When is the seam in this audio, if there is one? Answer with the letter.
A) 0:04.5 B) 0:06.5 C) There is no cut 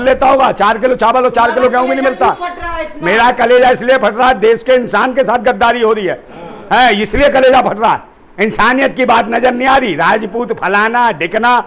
C